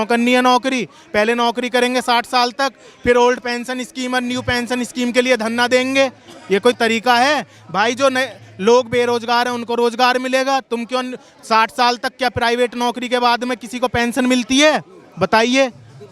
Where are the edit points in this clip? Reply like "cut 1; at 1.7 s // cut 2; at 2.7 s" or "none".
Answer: none